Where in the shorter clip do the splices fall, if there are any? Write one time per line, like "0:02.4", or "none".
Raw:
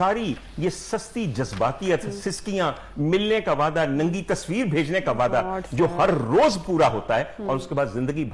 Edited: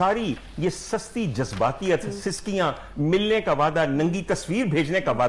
none